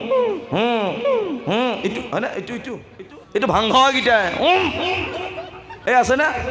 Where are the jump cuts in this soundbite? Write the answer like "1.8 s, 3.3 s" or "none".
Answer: 2.8 s